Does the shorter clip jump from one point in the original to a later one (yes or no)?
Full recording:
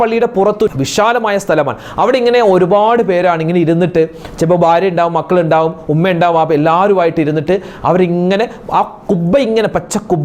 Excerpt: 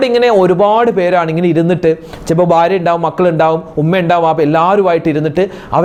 no